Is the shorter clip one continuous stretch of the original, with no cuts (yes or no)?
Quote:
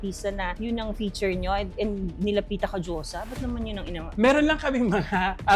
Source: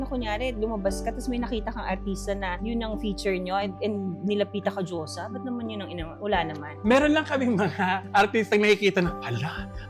no